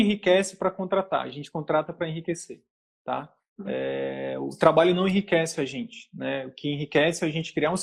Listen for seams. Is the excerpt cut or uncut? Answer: uncut